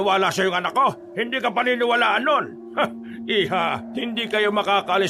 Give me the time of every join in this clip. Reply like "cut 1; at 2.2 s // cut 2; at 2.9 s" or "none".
cut 1; at 1.1 s // cut 2; at 2.6 s // cut 3; at 3.8 s